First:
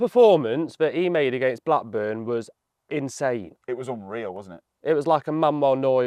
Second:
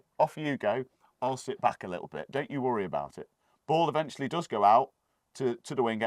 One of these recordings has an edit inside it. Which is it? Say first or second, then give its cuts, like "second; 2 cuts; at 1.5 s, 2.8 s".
second; 1 cut; at 3.5 s